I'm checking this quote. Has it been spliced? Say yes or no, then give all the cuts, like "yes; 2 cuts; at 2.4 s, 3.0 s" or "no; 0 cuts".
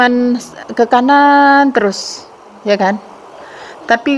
no; 0 cuts